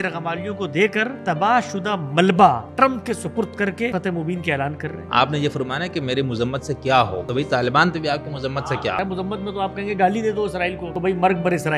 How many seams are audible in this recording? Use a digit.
7